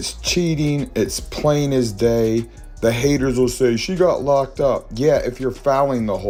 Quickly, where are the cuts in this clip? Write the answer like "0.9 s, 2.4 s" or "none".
none